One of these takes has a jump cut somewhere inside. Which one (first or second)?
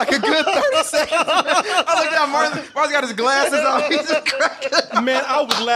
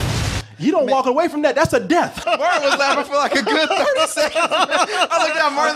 second